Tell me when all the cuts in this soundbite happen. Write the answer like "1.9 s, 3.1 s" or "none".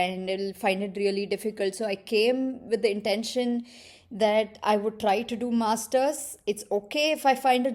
none